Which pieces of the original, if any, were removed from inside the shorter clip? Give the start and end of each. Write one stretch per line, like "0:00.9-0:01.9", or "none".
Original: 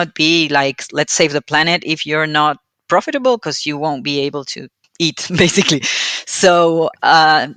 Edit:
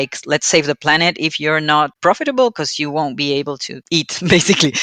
0:02.6-0:02.8
0:04.6-0:04.8